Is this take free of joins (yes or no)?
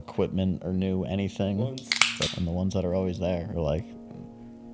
no